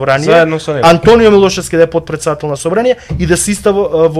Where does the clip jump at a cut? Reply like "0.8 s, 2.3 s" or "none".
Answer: none